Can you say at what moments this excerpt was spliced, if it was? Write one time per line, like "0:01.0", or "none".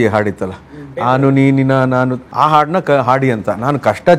0:02.2